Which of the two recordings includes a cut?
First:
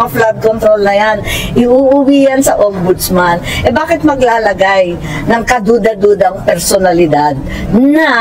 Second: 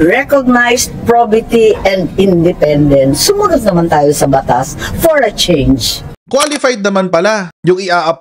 second; 1 cut; at 6.0 s

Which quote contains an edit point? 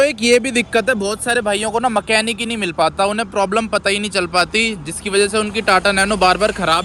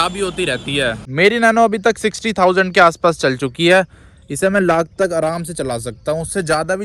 second; 1 cut; at 1.0 s

